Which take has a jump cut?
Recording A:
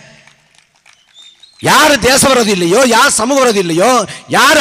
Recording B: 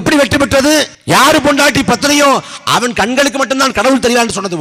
B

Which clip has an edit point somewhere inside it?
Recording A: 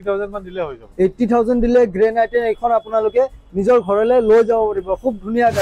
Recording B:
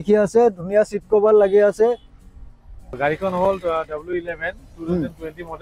B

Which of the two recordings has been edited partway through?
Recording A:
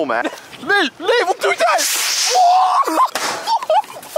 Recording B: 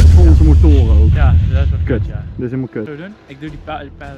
A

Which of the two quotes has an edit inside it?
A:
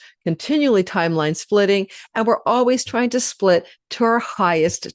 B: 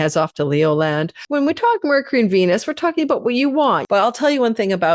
B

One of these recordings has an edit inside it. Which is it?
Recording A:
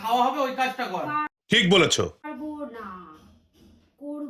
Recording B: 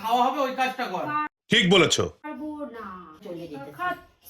B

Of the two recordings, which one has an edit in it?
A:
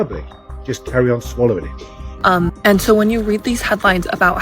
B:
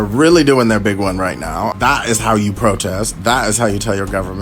A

